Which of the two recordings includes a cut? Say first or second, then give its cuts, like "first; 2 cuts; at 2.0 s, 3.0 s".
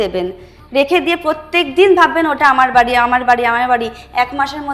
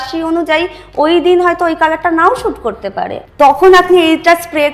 second; 1 cut; at 3.2 s